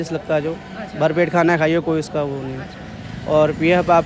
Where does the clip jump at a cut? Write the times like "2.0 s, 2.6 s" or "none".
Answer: none